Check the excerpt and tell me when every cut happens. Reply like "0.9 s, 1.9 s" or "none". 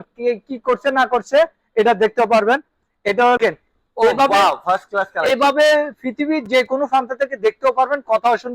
3.4 s